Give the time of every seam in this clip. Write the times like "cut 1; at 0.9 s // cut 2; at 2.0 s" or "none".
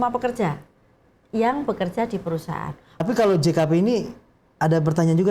cut 1; at 3.0 s